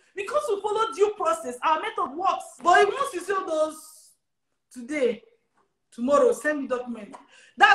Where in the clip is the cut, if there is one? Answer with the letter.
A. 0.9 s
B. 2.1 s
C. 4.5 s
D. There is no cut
B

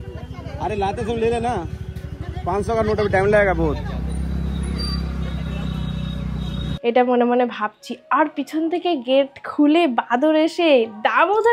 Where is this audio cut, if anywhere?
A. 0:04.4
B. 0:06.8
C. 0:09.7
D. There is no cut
B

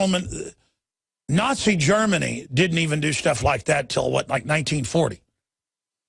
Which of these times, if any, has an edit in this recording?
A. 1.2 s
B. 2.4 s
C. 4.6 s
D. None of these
B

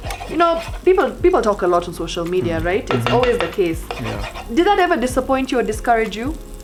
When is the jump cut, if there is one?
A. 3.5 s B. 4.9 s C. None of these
C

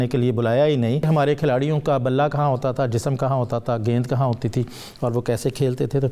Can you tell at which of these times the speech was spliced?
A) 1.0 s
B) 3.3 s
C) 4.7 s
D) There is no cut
A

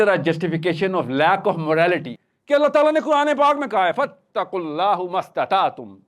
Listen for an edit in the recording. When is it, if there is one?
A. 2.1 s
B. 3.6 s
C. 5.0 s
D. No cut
A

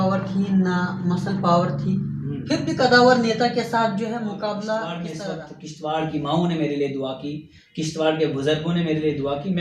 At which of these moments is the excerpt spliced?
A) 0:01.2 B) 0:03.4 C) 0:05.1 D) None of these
C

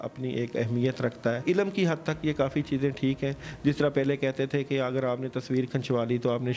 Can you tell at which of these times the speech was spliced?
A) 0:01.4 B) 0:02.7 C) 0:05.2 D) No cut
A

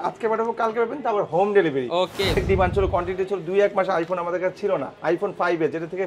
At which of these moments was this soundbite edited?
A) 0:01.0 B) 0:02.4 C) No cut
B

